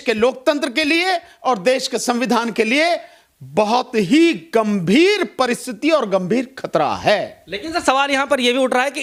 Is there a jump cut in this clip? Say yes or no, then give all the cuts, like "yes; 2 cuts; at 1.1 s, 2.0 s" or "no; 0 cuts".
no; 0 cuts